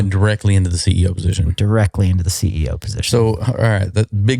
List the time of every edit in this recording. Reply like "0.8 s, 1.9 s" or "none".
none